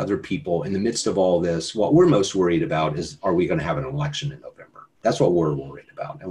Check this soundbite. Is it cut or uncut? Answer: uncut